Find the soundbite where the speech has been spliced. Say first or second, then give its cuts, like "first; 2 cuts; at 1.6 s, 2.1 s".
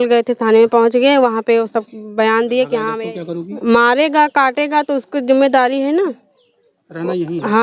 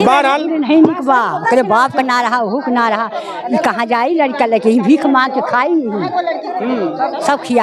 first; 1 cut; at 2.9 s